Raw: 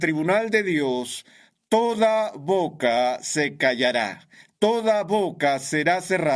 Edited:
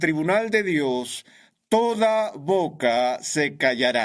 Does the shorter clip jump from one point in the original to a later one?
no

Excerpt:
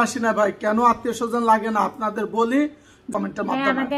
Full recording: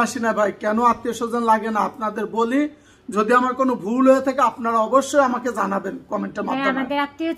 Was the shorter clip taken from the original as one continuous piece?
no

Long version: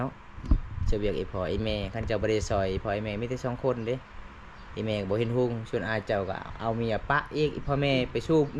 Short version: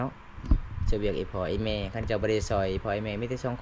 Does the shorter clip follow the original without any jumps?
yes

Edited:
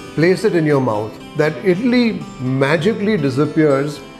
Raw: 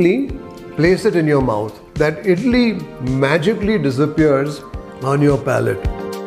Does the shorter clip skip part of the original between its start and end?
no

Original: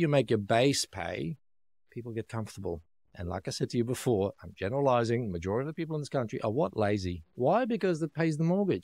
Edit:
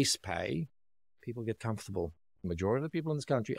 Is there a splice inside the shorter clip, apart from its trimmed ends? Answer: yes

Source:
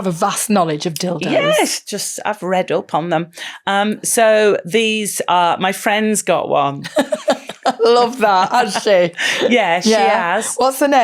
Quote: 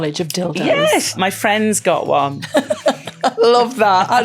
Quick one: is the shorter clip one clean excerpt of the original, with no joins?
no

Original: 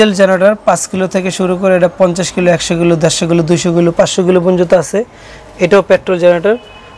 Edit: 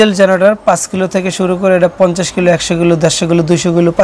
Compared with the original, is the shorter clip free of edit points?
yes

